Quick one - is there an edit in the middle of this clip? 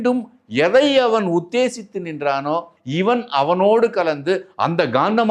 yes; 1 cut; at 2.8 s

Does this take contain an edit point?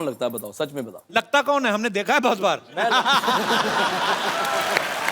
yes; 1 cut; at 1.1 s

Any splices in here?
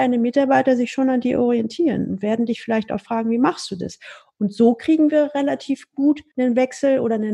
yes; 1 cut; at 6.3 s

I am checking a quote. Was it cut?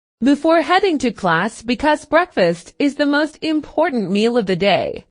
yes; 1 cut; at 1.6 s

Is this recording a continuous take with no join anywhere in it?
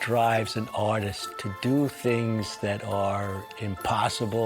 no; 1 cut; at 1.2 s

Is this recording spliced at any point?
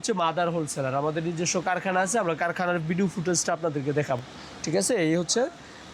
no; 0 cuts

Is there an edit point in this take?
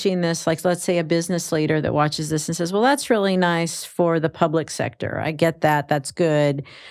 no; 0 cuts

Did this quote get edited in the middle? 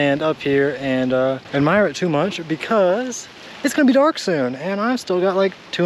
no; 0 cuts

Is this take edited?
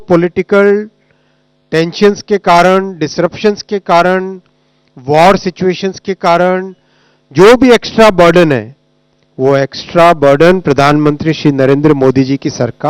no; 0 cuts

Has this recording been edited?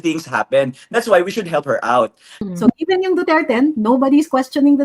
yes; 1 cut; at 2.4 s

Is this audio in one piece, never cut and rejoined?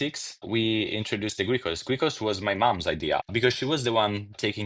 no; 1 cut; at 3.2 s

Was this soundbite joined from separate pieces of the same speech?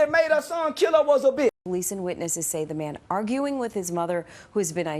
yes; 1 cut; at 1.5 s

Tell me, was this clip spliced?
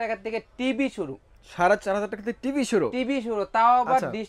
no; 0 cuts

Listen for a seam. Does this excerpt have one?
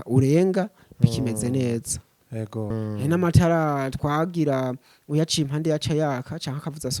yes; 1 cut; at 2.7 s

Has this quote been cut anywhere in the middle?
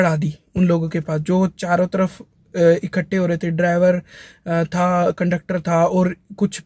no; 0 cuts

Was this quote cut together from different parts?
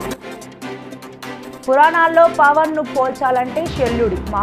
yes; 1 cut; at 1.6 s

